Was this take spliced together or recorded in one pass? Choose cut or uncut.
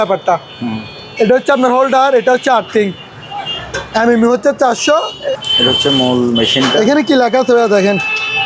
cut